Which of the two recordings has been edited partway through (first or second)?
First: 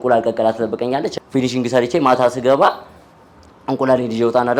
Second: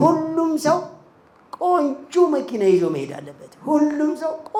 first